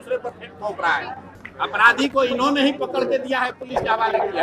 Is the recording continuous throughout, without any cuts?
no; 1 cut; at 1.3 s

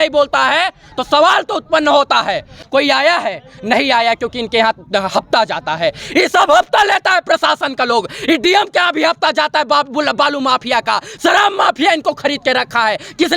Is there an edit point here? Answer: yes; 1 cut; at 2.6 s

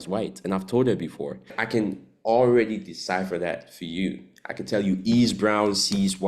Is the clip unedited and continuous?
no; 1 cut; at 1.6 s

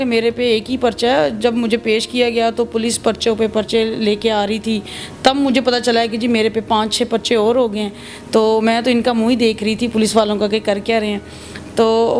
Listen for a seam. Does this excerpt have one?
no; 0 cuts

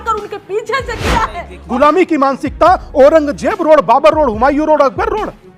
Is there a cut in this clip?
yes; 1 cut; at 1.5 s

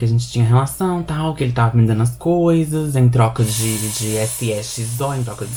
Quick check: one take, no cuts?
yes; 0 cuts

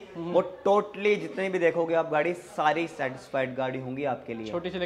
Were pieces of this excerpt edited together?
no; 0 cuts

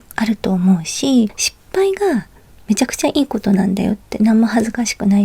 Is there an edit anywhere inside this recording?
yes; 1 cut; at 1.5 s

